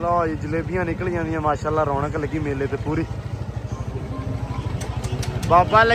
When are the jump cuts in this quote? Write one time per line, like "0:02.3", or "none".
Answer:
none